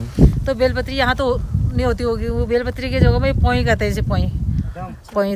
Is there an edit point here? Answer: no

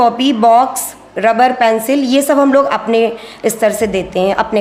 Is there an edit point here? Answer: no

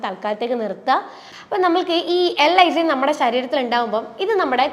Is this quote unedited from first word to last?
no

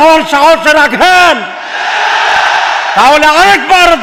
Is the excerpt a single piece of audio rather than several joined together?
yes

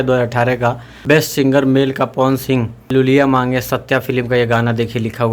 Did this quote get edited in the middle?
yes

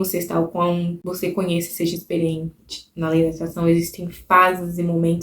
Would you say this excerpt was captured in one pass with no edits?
no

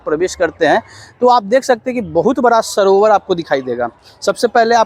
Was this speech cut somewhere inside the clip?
no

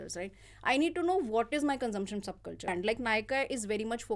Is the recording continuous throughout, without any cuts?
no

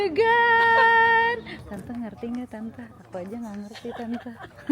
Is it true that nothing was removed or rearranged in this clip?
no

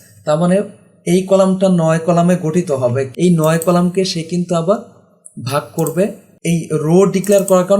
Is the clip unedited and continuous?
no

